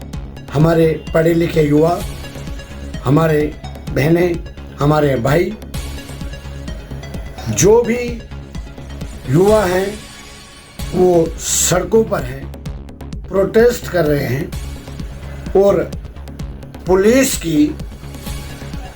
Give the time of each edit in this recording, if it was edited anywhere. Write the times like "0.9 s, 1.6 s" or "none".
17.8 s